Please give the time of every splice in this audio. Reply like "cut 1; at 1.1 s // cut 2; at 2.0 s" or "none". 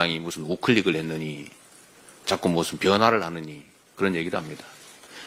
none